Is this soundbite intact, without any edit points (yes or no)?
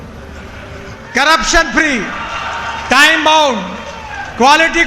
no